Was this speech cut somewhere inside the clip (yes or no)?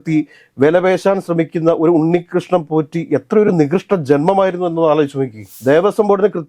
yes